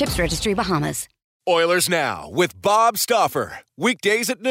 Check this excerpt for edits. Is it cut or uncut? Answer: cut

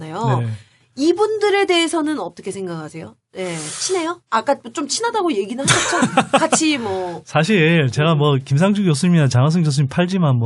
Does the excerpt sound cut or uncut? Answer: cut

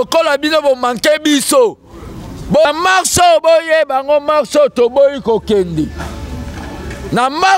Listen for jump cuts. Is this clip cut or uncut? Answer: cut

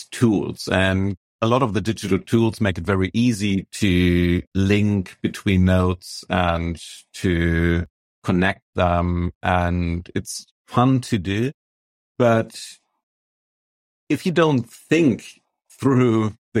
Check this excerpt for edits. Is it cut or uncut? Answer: cut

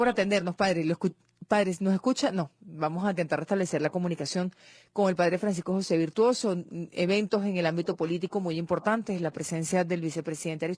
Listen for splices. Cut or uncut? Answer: cut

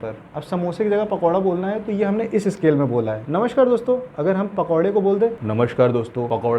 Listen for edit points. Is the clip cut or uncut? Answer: uncut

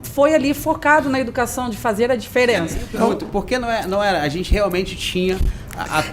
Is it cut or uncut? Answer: cut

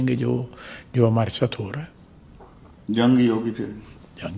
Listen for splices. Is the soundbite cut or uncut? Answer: uncut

